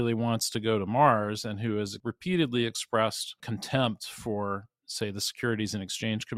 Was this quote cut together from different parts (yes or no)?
yes